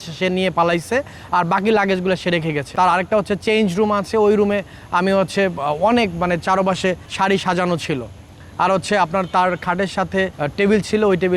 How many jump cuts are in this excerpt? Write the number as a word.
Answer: three